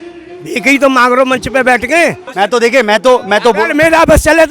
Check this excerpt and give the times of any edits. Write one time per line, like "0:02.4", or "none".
0:02.2